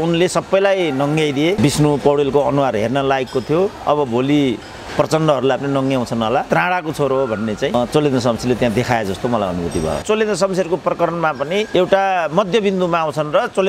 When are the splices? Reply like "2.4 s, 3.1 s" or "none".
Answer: 1.6 s, 6.5 s, 10.0 s